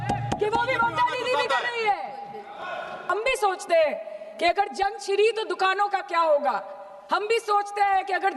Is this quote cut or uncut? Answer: cut